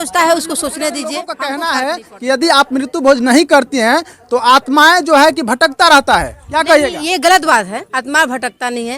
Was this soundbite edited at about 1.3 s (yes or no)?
yes